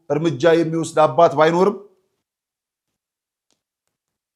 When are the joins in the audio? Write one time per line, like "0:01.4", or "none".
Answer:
none